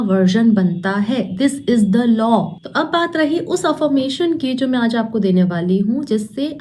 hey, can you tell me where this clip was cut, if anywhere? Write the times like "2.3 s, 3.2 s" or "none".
2.6 s